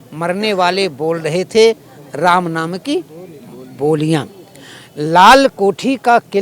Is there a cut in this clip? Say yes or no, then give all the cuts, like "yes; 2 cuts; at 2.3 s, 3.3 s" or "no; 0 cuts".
no; 0 cuts